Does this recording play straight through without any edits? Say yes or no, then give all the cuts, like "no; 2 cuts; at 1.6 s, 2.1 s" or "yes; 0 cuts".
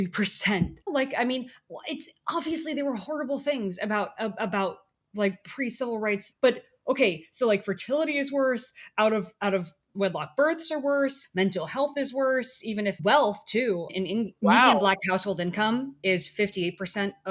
no; 5 cuts; at 0.8 s, 6.3 s, 11.2 s, 13.0 s, 13.9 s